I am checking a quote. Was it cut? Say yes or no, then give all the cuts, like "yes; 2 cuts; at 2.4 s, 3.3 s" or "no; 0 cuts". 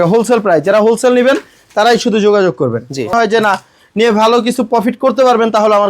yes; 1 cut; at 3.1 s